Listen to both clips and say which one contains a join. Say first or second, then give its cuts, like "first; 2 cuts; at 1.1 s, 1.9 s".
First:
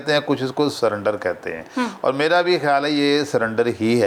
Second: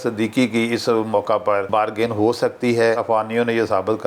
second; 2 cuts; at 1.7 s, 3.0 s